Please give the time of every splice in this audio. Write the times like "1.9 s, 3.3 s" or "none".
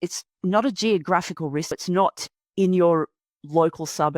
1.7 s